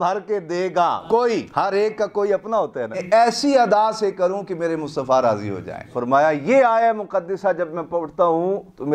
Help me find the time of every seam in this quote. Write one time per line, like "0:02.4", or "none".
0:03.0
0:05.9

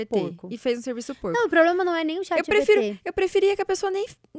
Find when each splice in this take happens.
none

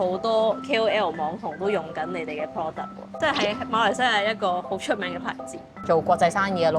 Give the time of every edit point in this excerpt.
0:05.8

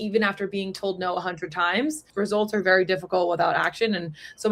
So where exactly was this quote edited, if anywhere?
0:02.0

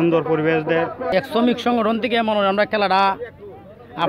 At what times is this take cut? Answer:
0:01.1

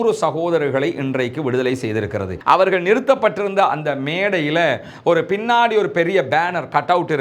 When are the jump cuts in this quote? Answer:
0:02.3

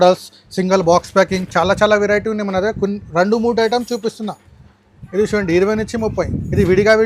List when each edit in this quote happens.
none

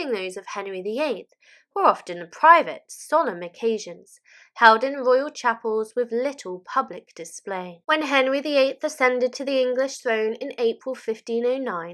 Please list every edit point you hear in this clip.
0:07.8

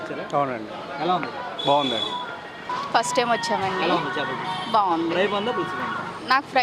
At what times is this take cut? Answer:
0:02.6

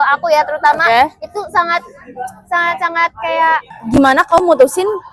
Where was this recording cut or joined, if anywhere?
0:03.7

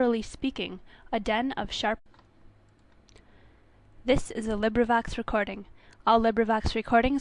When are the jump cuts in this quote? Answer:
none

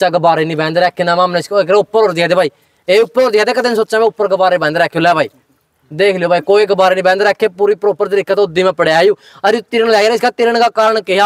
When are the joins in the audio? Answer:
none

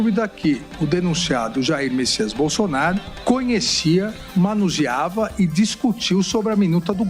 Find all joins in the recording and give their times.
0:03.1

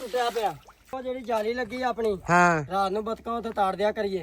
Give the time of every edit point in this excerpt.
0:01.0

